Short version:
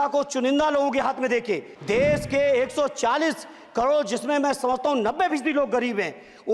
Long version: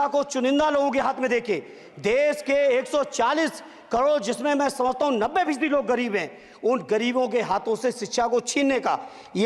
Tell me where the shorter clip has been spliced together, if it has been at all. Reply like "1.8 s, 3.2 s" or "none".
1.7 s